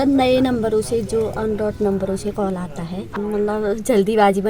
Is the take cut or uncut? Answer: cut